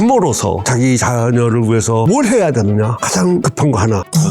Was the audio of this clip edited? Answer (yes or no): yes